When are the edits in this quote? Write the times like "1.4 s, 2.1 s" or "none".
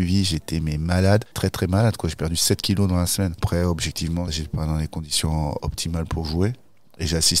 3.4 s

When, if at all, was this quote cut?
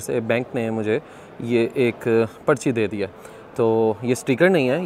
none

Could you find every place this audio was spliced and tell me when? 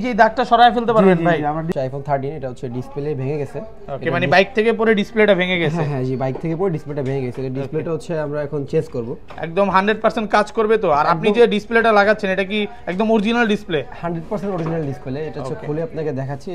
1.7 s

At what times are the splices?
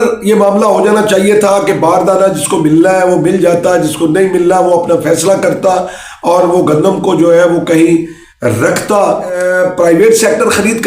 9.4 s

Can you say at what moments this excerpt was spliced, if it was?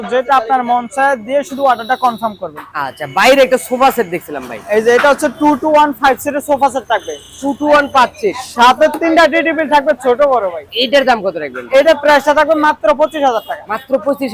none

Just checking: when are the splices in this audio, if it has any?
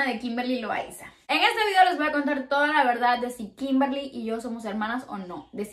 1.3 s

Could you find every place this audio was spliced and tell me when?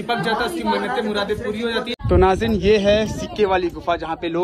2.0 s

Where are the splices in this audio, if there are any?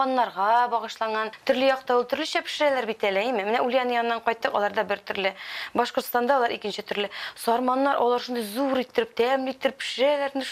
1.3 s

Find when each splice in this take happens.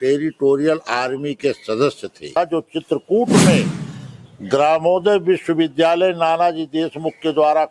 2.3 s

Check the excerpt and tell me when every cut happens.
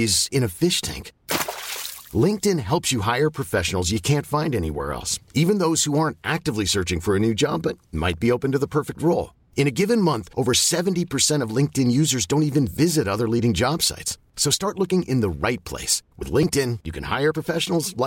none

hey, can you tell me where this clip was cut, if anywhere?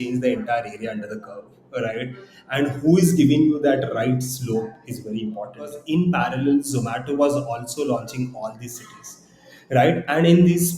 5.8 s

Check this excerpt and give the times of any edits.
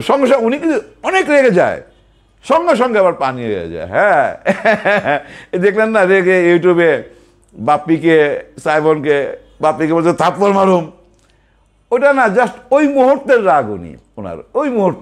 none

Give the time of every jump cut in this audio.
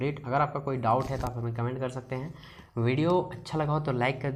none

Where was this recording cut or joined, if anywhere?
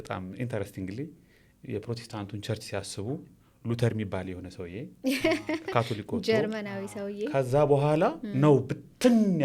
none

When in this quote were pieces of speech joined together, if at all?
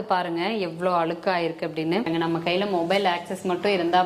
2.1 s

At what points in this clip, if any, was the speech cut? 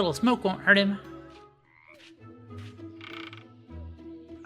1.0 s

